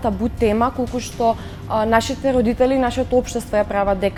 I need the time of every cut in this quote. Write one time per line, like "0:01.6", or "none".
none